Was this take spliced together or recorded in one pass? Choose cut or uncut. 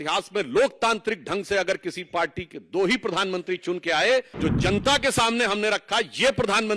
cut